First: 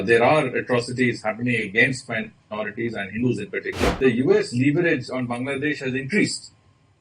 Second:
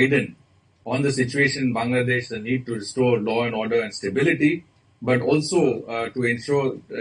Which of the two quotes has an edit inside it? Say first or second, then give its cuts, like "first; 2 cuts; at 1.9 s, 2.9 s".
first; 1 cut; at 4.0 s